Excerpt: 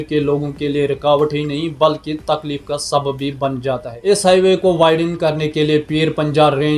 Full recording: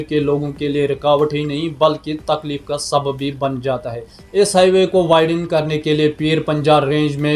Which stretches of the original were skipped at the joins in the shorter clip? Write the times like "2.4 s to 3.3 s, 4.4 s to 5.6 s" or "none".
3.9 s to 4.2 s